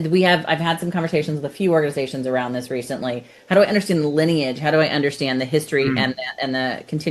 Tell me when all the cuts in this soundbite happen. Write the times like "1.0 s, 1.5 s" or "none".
none